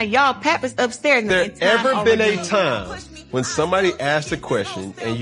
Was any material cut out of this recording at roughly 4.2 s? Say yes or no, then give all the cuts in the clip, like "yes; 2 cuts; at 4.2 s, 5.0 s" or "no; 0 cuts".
no; 1 cut; at 1.3 s